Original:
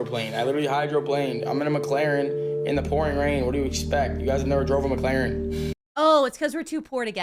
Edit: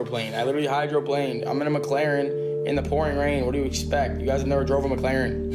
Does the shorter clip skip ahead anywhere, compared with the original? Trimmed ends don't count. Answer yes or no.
no